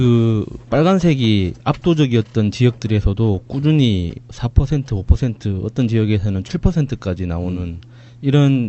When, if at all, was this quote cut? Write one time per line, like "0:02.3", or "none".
0:04.1